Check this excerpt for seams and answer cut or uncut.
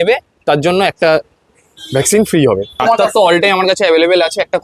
cut